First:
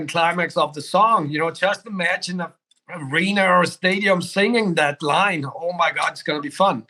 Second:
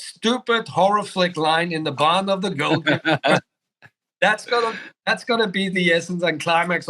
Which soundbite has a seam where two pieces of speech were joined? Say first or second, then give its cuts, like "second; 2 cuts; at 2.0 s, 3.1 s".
second; 1 cut; at 4.9 s